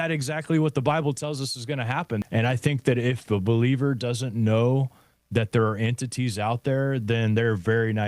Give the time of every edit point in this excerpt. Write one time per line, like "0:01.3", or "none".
0:02.2